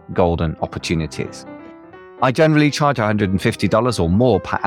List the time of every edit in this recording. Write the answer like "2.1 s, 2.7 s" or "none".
none